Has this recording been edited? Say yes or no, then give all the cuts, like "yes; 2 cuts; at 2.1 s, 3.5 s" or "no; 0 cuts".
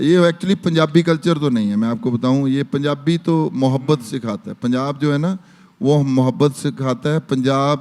no; 0 cuts